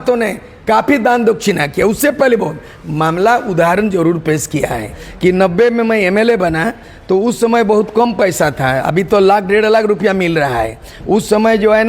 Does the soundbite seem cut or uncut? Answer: cut